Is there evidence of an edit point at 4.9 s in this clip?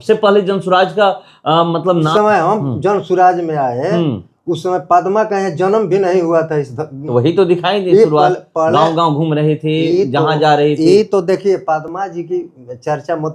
no; 2 cuts; at 2.1 s, 7.0 s

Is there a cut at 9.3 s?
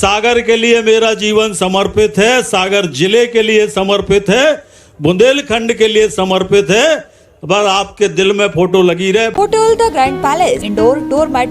yes; 2 cuts; at 9.3 s, 10.7 s

